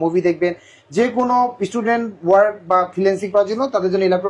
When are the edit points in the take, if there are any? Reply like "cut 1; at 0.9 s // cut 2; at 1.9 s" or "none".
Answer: none